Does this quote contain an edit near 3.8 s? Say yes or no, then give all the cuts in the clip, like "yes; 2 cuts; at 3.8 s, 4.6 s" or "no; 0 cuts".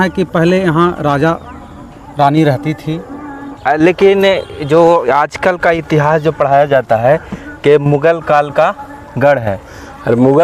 yes; 1 cut; at 3.8 s